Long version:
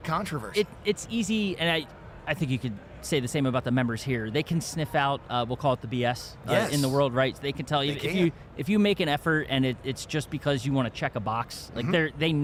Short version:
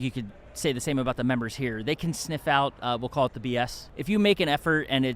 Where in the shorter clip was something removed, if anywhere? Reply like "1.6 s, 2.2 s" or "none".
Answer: 3.9 s

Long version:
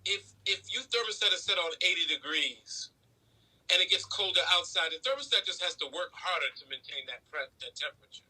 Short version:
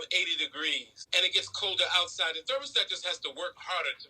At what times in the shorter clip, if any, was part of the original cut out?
0.9 s

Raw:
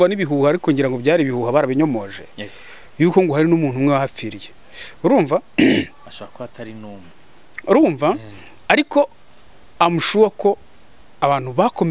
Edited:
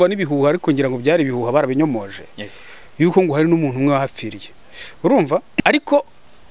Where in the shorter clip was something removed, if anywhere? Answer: 5.6 s

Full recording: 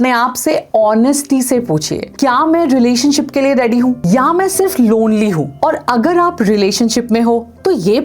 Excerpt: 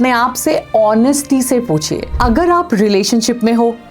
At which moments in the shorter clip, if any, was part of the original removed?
2.1 s

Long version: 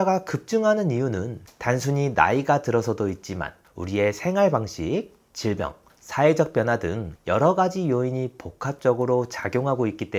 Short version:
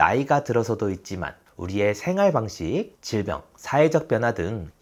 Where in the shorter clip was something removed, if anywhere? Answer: 3.2 s

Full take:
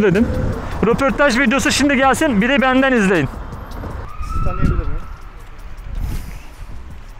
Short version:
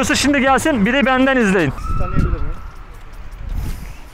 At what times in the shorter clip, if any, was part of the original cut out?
1.8 s

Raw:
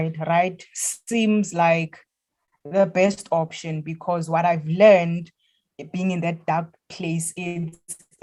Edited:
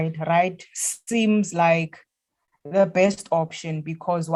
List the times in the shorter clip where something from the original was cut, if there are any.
none

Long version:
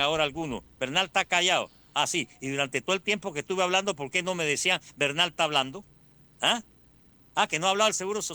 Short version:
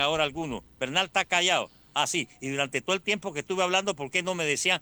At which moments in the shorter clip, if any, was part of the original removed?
none

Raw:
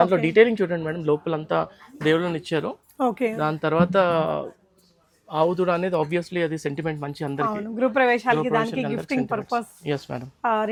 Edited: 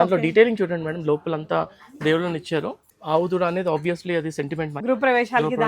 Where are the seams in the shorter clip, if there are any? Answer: 2.8 s, 4.8 s

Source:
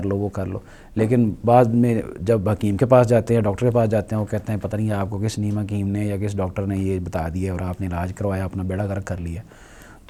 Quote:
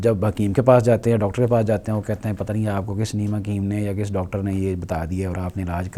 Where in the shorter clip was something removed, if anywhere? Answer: none

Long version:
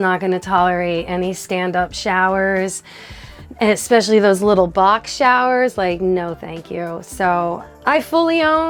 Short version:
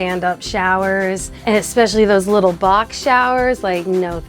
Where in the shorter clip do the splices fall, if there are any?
1.3 s

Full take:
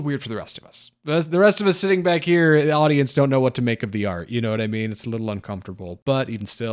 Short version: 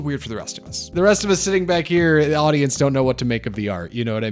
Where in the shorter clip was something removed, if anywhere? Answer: 0.9 s

